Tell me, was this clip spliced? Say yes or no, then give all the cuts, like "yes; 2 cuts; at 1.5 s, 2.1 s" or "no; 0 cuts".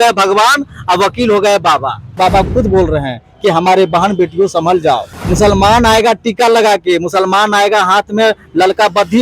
yes; 2 cuts; at 2.2 s, 5.2 s